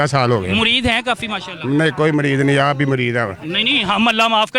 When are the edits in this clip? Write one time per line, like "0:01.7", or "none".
none